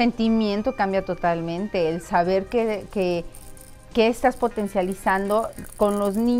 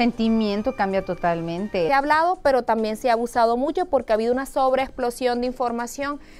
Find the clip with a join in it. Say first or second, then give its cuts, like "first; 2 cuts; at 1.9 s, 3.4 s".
first; 1 cut; at 1.9 s